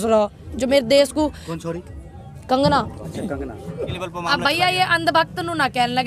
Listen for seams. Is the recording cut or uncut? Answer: cut